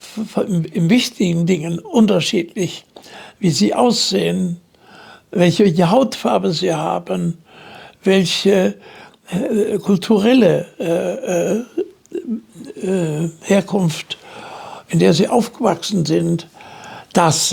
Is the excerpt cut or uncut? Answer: uncut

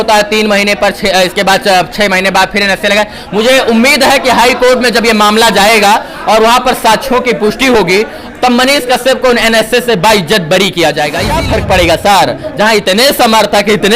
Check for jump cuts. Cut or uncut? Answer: cut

